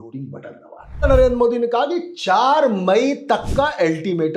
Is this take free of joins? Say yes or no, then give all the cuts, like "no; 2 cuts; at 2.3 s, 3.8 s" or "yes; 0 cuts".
no; 1 cut; at 1.0 s